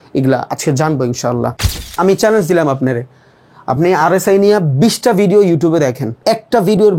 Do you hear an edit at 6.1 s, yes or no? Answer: yes